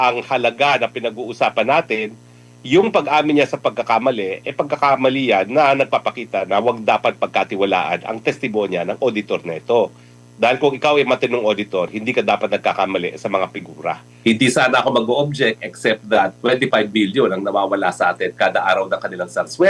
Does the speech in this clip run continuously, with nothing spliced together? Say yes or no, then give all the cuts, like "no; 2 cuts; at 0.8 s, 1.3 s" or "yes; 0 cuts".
no; 1 cut; at 14.1 s